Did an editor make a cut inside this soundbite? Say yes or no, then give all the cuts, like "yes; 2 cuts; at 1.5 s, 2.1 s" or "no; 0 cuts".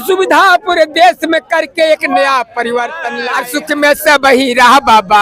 yes; 1 cut; at 3.2 s